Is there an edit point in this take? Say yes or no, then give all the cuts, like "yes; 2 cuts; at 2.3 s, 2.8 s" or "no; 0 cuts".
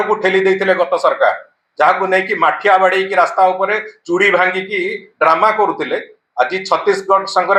no; 0 cuts